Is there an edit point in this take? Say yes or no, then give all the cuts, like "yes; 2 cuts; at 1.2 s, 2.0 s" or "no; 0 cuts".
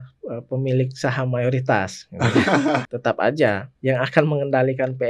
yes; 2 cuts; at 2.9 s, 3.7 s